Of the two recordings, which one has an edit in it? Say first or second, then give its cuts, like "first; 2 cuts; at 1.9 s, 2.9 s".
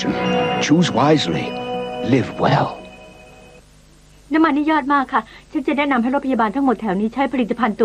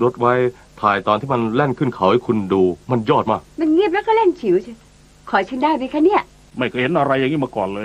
second; 1 cut; at 6.5 s